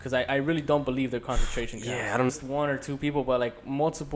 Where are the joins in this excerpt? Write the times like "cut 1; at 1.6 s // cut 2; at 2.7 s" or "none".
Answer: cut 1; at 2.3 s